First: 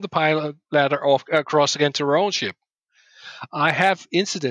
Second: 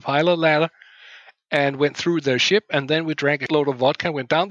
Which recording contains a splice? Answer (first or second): second